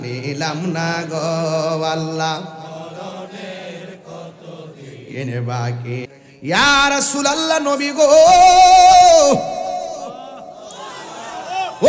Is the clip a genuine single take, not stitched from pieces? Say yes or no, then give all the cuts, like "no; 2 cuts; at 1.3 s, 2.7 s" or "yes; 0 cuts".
no; 1 cut; at 6.1 s